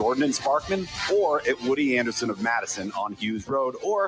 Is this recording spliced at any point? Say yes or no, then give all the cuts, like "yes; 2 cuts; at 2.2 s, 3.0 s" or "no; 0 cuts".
yes; 1 cut; at 2.5 s